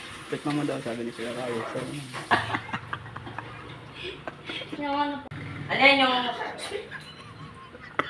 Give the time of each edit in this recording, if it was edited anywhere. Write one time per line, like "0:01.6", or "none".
0:02.3
0:05.4